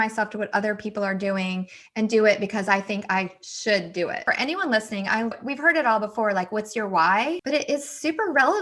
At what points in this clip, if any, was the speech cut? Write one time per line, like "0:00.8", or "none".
0:04.2
0:05.4
0:07.4